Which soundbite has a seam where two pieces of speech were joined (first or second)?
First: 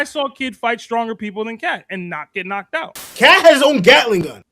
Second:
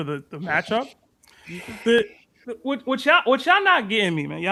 first